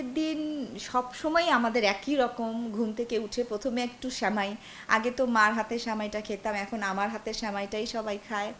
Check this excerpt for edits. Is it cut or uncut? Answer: uncut